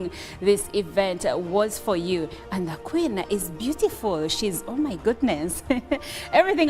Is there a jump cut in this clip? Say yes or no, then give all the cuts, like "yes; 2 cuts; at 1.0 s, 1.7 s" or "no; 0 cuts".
yes; 1 cut; at 3.1 s